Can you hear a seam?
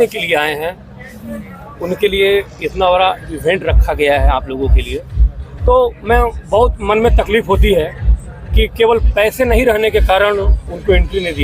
no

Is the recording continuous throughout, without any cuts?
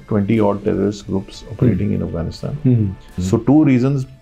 no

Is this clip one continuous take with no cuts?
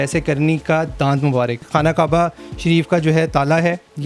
no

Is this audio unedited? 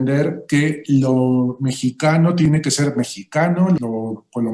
no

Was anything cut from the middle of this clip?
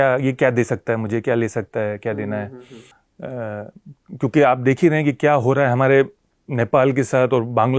no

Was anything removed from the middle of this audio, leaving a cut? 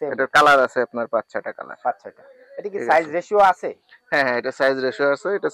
no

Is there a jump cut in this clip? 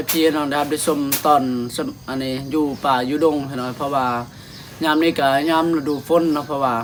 no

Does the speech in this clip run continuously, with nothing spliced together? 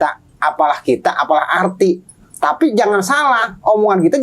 yes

